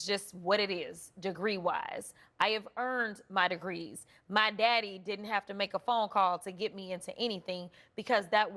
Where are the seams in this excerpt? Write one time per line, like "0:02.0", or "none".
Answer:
none